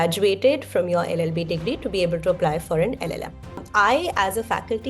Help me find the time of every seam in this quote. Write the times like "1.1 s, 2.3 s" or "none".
3.6 s